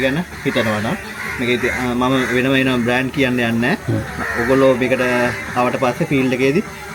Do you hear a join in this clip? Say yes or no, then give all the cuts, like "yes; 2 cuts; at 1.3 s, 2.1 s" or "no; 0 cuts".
no; 0 cuts